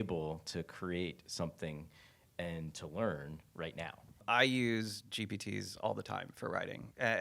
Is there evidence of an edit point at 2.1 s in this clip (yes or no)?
no